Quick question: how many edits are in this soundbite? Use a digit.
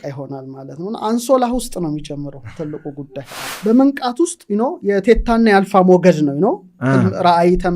1